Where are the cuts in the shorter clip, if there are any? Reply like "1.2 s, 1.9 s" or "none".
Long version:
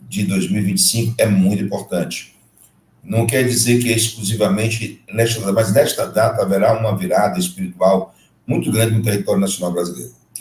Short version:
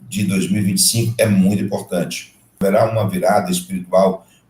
2.6 s